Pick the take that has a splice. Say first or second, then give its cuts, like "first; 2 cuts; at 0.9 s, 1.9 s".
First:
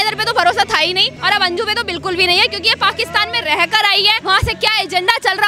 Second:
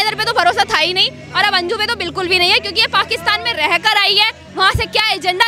first; 2 cuts; at 1.1 s, 4.2 s